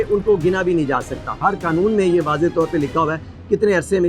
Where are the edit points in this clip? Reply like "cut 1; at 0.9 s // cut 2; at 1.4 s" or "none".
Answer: cut 1; at 1.4 s